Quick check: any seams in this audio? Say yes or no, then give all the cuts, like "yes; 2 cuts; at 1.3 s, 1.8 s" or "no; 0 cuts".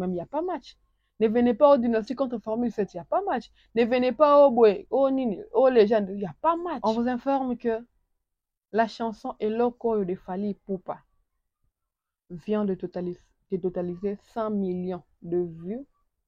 yes; 1 cut; at 6.8 s